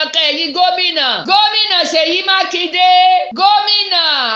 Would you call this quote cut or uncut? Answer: cut